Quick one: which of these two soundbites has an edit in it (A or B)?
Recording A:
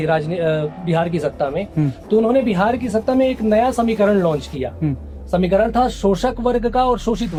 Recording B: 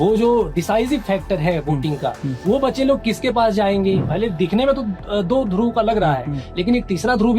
B